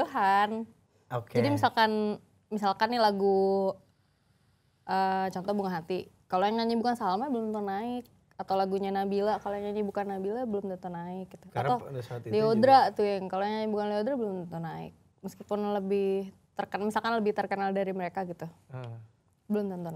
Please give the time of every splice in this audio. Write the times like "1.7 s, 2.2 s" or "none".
none